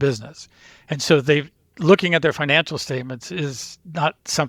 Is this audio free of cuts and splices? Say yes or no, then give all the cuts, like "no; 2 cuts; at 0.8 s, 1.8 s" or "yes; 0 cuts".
yes; 0 cuts